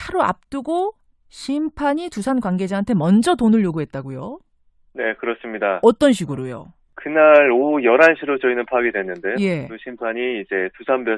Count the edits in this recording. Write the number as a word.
one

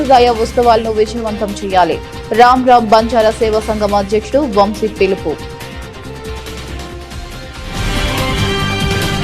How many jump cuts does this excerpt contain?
one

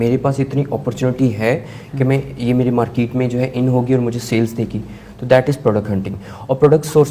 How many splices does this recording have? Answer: zero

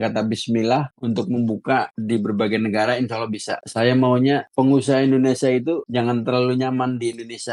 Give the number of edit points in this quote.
one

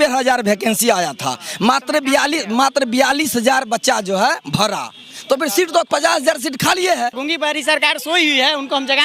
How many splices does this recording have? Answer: one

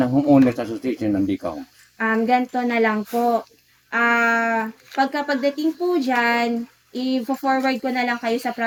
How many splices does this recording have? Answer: zero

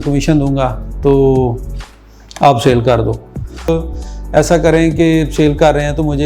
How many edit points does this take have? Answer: one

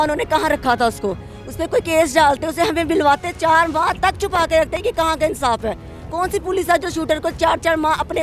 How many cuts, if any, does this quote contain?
zero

